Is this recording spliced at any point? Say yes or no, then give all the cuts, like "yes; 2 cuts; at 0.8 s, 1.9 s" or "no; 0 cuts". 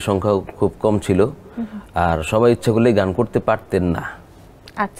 no; 0 cuts